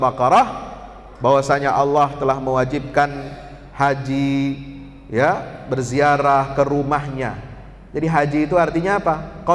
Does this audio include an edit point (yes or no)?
no